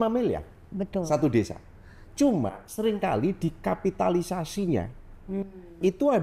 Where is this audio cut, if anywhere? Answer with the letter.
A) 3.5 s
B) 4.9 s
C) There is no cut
C